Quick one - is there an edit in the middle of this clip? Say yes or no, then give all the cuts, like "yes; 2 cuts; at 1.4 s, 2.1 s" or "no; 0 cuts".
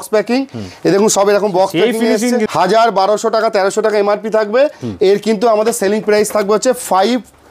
yes; 1 cut; at 2.5 s